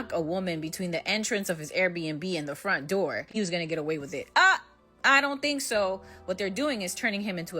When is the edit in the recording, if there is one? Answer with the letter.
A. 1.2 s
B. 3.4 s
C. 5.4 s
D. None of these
B